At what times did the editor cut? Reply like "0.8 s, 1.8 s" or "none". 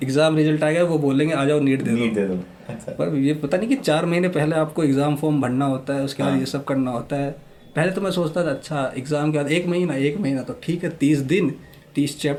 none